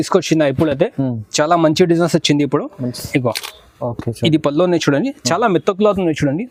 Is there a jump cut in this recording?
no; 0 cuts

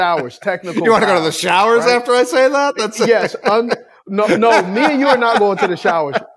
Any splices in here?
no; 0 cuts

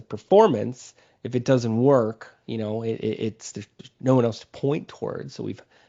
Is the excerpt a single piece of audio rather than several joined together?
yes; 0 cuts

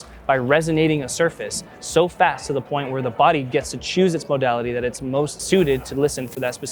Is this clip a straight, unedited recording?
no; 1 cut; at 5.4 s

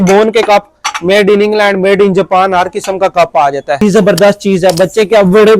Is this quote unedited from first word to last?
no; 1 cut; at 3.8 s

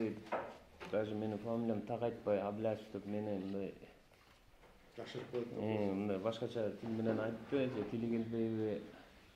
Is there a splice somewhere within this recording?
no; 0 cuts

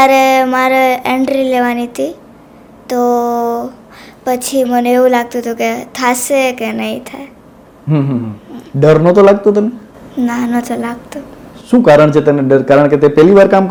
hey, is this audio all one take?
yes; 0 cuts

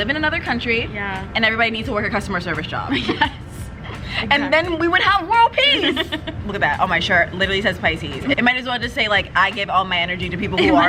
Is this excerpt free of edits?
no; 2 cuts; at 6.4 s, 8.4 s

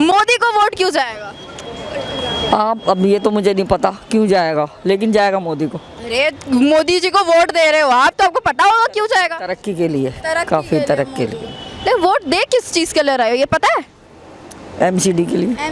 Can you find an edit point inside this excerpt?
no; 0 cuts

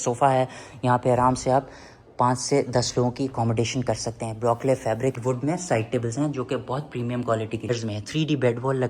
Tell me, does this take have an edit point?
yes; 2 cuts; at 5.2 s, 7.7 s

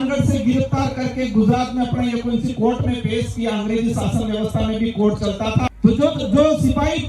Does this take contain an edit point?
yes; 1 cut; at 5.7 s

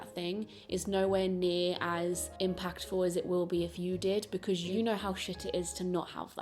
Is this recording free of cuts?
no; 2 cuts; at 2.3 s, 4.7 s

